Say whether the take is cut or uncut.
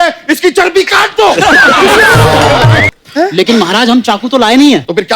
cut